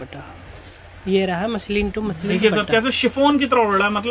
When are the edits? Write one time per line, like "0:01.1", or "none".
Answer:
none